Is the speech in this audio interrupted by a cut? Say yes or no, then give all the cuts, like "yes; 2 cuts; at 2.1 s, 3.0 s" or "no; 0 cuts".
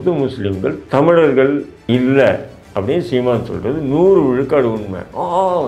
yes; 1 cut; at 1.7 s